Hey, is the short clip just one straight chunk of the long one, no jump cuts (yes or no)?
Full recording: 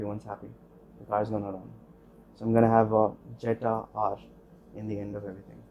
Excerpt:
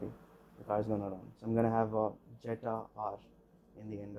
no